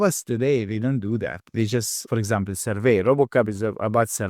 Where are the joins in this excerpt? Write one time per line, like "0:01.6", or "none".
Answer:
0:02.0